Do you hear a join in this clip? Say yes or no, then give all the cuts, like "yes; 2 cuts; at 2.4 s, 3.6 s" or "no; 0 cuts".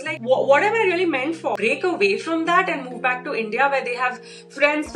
yes; 1 cut; at 1.6 s